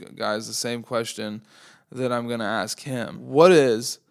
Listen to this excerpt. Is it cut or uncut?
cut